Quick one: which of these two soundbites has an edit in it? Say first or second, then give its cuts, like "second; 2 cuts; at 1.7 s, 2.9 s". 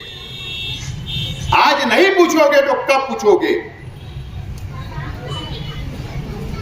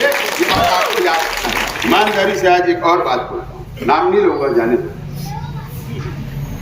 second; 1 cut; at 1.7 s